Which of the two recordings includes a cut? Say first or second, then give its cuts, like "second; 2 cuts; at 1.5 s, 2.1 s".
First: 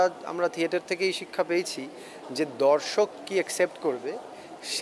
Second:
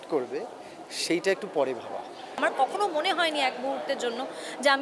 second; 1 cut; at 2.2 s